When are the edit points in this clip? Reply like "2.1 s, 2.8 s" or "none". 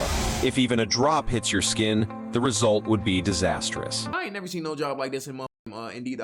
1.3 s, 4.1 s

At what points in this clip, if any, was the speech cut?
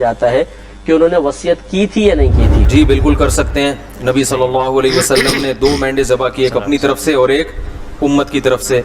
2.7 s

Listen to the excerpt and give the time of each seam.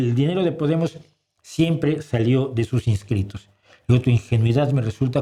none

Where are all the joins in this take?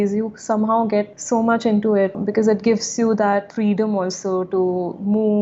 1.2 s, 2.2 s

